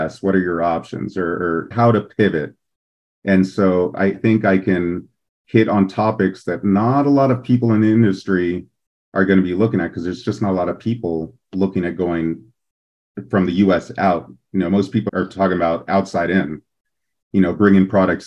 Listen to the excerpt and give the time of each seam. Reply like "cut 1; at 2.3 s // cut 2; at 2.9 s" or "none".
cut 1; at 1.7 s // cut 2; at 4.2 s // cut 3; at 15.1 s